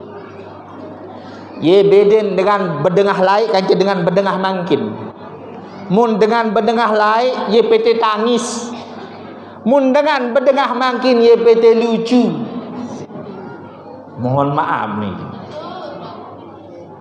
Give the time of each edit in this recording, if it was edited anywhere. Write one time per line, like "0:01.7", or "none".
none